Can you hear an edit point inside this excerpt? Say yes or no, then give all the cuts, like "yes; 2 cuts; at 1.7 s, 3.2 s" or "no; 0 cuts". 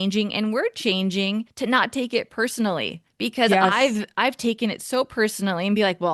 yes; 2 cuts; at 1.5 s, 3.0 s